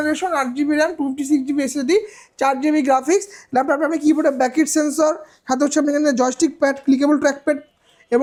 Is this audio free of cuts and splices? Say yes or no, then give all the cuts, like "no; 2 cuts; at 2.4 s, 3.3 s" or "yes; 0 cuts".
yes; 0 cuts